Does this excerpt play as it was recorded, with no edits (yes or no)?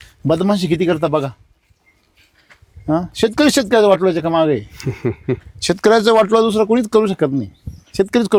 yes